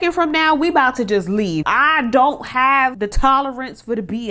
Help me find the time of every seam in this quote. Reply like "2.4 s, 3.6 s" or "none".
1.6 s, 3.0 s